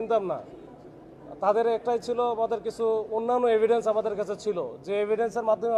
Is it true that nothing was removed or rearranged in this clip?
yes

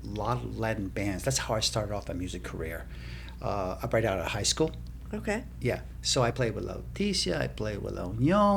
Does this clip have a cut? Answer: no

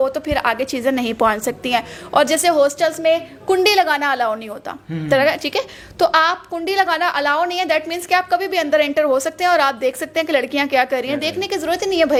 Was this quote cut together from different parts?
no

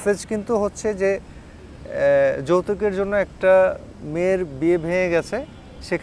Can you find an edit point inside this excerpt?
no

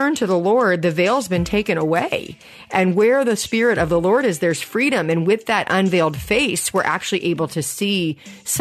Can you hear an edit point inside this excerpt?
no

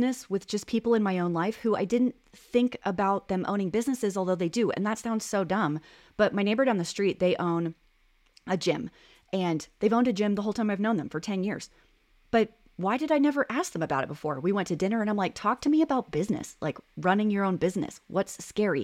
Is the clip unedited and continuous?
yes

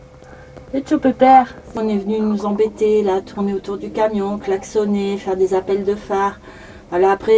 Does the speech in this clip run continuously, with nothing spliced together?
no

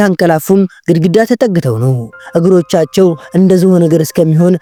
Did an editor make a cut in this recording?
no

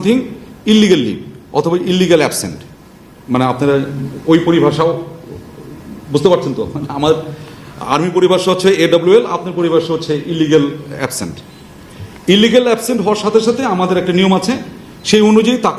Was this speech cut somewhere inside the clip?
no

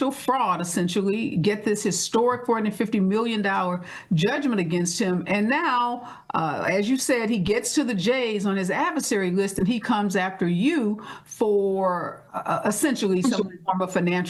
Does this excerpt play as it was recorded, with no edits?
yes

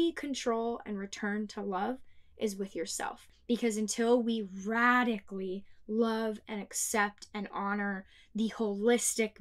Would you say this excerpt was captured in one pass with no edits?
no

